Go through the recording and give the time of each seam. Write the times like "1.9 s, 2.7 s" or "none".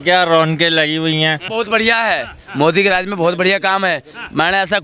1.5 s